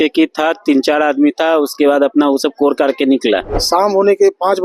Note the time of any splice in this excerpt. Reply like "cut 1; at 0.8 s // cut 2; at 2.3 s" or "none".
cut 1; at 3.5 s